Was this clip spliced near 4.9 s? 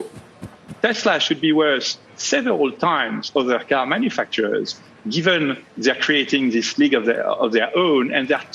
yes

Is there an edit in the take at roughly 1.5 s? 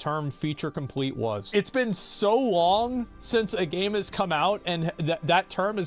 yes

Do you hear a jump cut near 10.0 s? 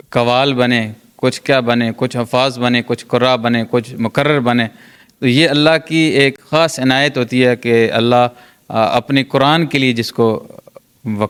no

